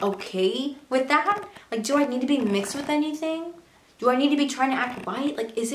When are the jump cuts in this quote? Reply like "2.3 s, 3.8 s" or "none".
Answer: none